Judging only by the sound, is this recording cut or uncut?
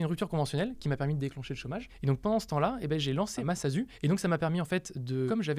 uncut